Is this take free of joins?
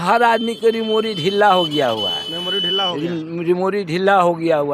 yes; 0 cuts

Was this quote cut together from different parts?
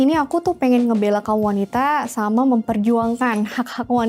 no; 0 cuts

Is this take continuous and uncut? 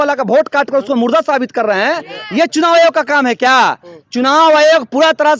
yes; 0 cuts

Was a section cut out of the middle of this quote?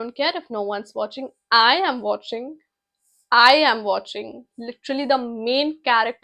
no; 0 cuts

